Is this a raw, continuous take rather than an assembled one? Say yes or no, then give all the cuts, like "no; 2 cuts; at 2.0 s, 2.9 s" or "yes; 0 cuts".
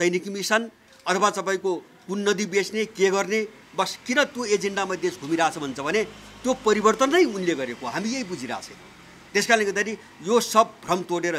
yes; 0 cuts